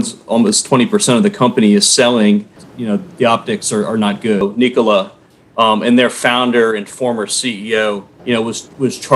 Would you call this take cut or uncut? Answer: cut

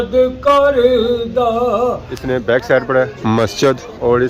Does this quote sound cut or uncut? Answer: cut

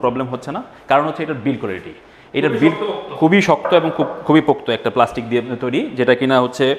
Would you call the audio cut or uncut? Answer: uncut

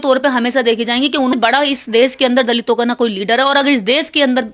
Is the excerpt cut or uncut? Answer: cut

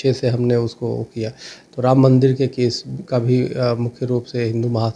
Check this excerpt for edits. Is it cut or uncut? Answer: uncut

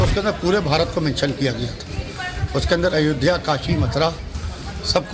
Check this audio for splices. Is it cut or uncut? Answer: uncut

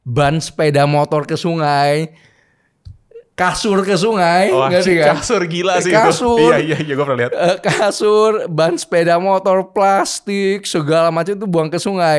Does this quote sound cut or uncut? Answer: uncut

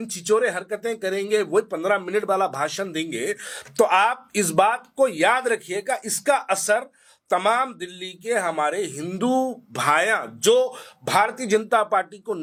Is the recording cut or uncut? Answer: uncut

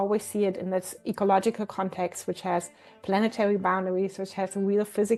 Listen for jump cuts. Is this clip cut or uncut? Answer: uncut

